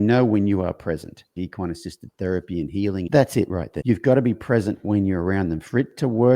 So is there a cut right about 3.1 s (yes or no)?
yes